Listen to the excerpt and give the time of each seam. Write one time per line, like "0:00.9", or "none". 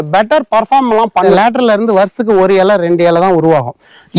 0:01.3

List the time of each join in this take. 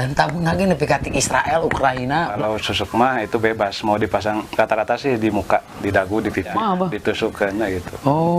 0:02.4
0:06.5

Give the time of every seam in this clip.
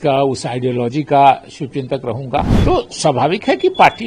0:02.5

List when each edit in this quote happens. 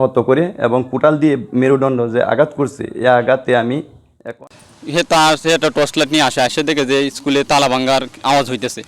0:04.4

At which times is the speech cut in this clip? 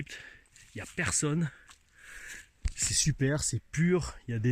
none

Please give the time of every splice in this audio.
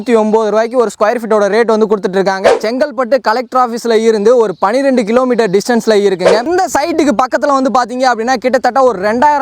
0:02.5
0:06.5

